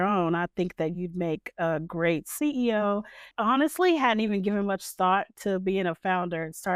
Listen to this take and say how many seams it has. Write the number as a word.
one